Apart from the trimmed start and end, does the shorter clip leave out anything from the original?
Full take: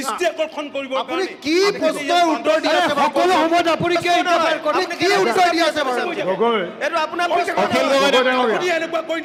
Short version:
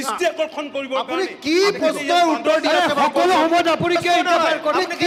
no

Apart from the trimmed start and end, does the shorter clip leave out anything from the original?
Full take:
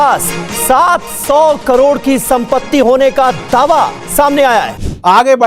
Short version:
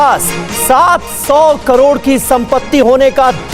no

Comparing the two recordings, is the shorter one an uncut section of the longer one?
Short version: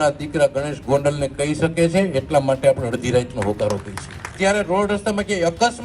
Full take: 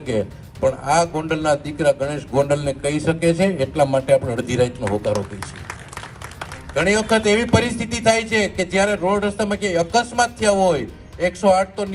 no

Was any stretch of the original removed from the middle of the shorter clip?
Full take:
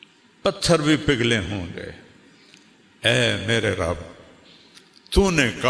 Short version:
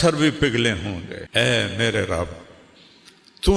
yes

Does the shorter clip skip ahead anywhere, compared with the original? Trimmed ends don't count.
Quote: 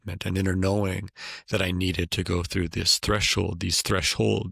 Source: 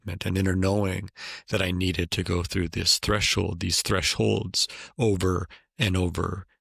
no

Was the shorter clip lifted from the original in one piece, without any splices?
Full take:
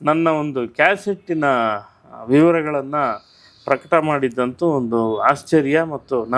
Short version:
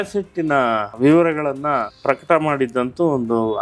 no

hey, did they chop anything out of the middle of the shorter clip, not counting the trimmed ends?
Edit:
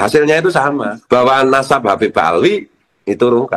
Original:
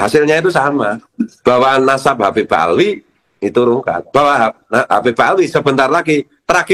yes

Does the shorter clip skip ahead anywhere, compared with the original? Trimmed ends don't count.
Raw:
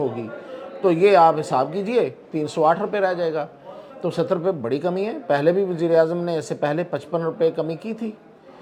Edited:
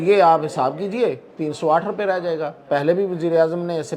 yes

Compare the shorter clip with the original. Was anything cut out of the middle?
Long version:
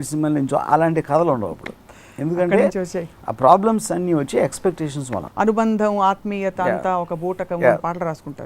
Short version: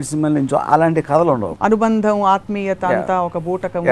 yes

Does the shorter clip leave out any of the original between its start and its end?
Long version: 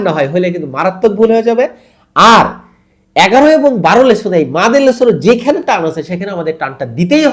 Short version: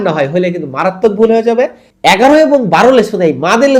yes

